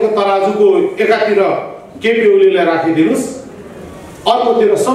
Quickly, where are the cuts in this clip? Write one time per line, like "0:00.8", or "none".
none